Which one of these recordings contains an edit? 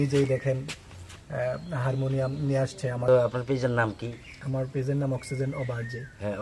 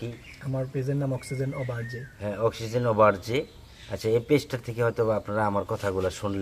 first; 1 cut; at 3.1 s

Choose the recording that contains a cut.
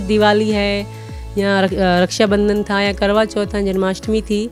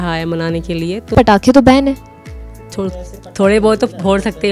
second; 1 cut; at 1.1 s

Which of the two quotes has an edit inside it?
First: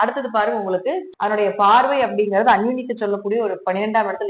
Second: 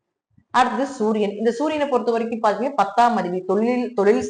first; 1 cut; at 1.1 s

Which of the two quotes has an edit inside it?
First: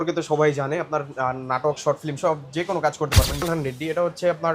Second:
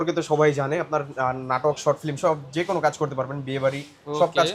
first; 1 cut; at 3.4 s

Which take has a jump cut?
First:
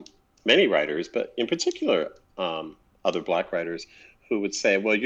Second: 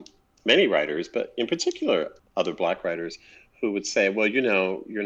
second; 1 cut; at 2.2 s

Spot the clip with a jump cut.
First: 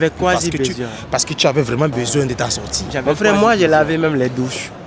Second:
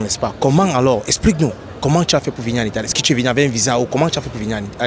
first; 1 cut; at 3.0 s

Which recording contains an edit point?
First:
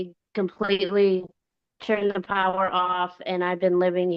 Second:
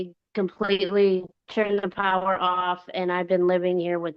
second; 1 cut; at 1.4 s

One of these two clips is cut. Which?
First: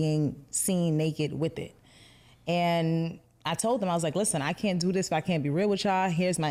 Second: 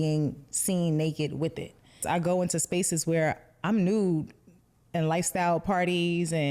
second; 1 cut; at 2.0 s

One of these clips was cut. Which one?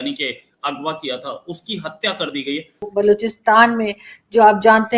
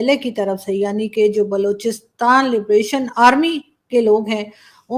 first; 1 cut; at 2.9 s

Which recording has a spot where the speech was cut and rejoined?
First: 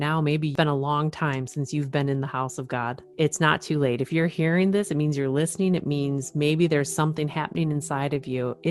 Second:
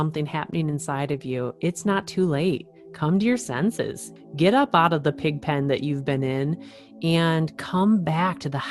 second; 1 cut; at 4.1 s

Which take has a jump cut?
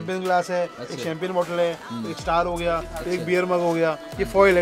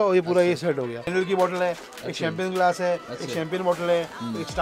second; 1 cut; at 1.1 s

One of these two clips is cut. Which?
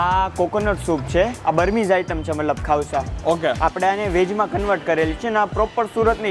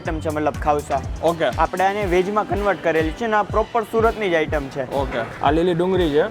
second; 1 cut; at 5.3 s

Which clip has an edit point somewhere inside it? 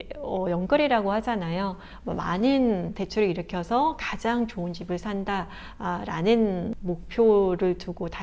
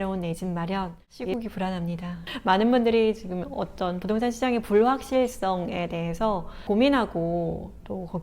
second; 3 cuts; at 0.8 s, 2.3 s, 6.5 s

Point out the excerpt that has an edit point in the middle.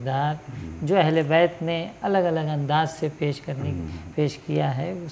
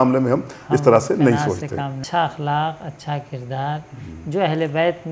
second; 1 cut; at 2.0 s

